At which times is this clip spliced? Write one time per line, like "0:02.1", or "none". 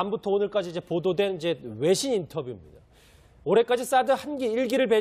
0:01.1